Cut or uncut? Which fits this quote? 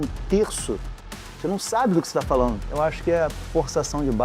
cut